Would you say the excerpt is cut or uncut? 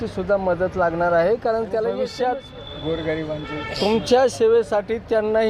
cut